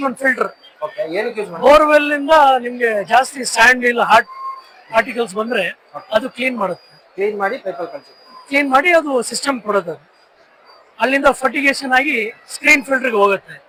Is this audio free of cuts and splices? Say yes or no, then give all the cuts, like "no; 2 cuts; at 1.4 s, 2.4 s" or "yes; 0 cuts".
yes; 0 cuts